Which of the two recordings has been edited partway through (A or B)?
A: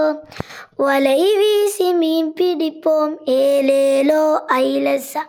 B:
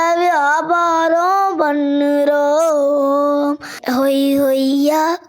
B